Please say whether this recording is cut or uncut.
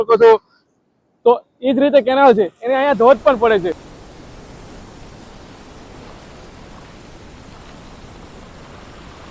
cut